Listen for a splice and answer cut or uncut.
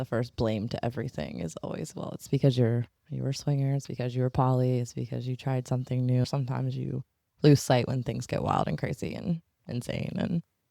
cut